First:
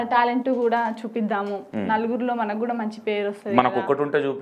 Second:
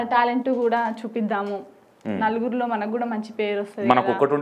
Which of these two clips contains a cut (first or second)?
first